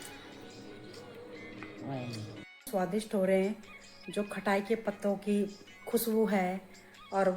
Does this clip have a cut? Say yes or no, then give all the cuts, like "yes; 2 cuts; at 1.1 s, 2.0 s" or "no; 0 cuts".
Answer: yes; 1 cut; at 2.7 s